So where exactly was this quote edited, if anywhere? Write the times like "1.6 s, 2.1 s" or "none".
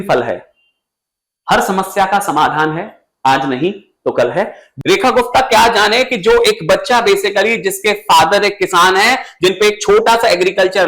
4.6 s